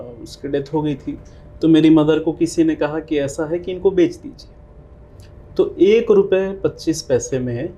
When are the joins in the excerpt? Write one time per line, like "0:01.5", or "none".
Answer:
none